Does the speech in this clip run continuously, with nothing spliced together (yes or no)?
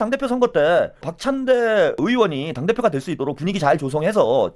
no